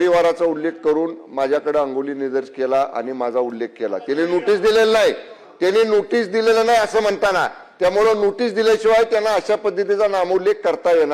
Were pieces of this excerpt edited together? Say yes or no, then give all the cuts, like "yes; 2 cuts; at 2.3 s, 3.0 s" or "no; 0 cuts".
no; 0 cuts